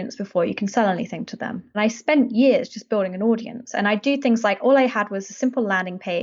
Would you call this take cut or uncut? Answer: cut